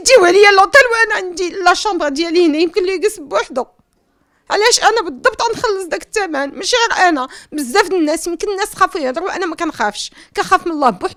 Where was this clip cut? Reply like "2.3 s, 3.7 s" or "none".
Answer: none

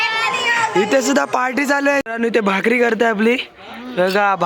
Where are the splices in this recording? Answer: 2.0 s

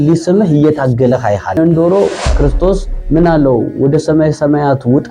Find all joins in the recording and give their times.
1.6 s

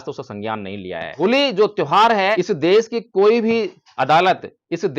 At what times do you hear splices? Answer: 1.1 s, 2.4 s

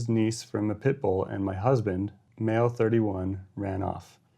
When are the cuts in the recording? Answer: 2.2 s

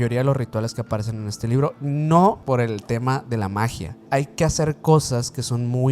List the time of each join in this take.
2.4 s, 4.0 s

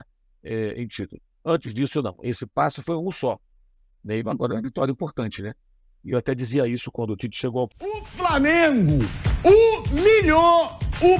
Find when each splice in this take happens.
8.1 s

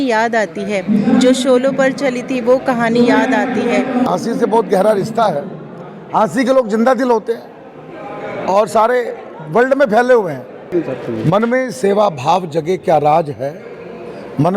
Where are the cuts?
4.1 s, 10.7 s

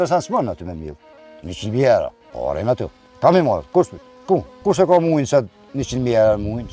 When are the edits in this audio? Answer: 2.2 s, 4.6 s

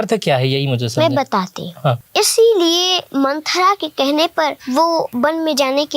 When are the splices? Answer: 2.0 s, 3.0 s, 4.9 s

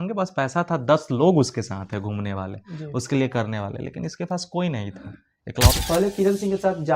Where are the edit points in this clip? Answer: 5.8 s

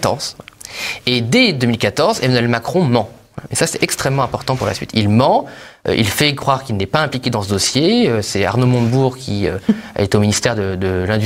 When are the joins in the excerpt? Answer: none

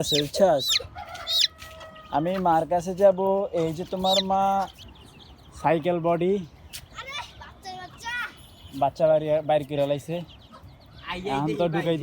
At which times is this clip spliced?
4.8 s

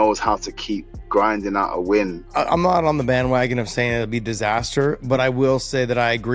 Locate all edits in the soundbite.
2.2 s

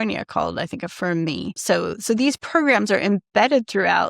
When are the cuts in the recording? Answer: 1.5 s

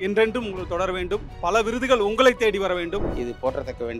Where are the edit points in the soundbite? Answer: 3.1 s

